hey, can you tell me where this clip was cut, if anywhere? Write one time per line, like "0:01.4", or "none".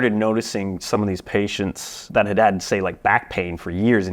0:02.0